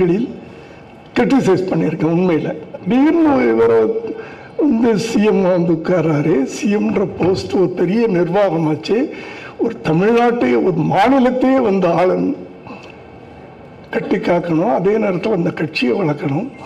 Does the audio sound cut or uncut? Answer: cut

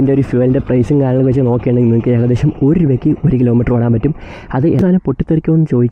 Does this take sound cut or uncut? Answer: cut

